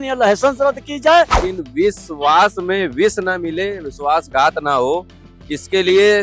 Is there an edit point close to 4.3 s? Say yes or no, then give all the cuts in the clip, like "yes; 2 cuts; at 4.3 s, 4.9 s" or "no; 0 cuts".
no; 1 cut; at 1.4 s